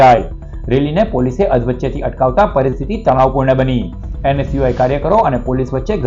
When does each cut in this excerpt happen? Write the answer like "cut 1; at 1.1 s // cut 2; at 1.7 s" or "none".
none

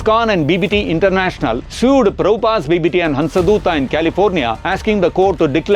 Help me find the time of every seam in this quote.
cut 1; at 1.7 s // cut 2; at 4.6 s

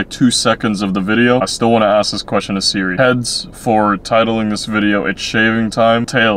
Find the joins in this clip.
cut 1; at 1.5 s

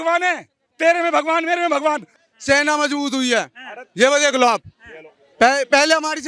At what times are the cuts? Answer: cut 1; at 2.3 s

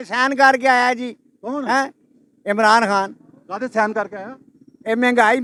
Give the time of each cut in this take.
none

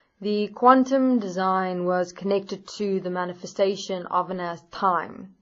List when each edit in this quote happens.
cut 1; at 3.8 s

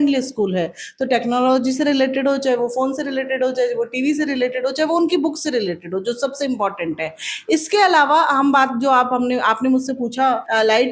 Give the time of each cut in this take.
none

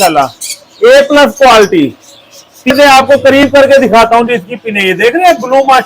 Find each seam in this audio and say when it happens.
cut 1; at 2.7 s

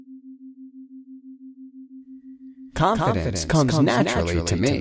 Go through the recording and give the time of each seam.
cut 1; at 2.7 s

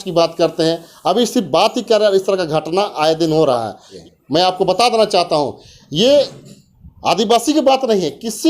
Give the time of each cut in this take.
cut 1; at 3.9 s

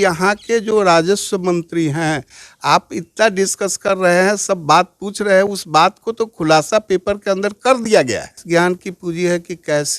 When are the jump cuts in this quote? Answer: cut 1; at 8.4 s

